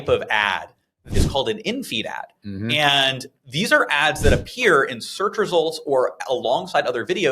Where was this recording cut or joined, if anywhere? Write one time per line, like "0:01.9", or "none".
0:01.1

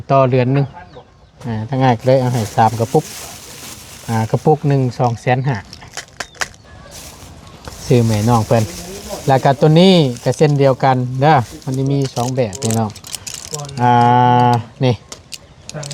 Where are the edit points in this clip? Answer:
0:06.6

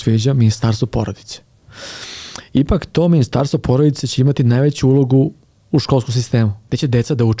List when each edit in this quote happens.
0:05.5
0:06.6

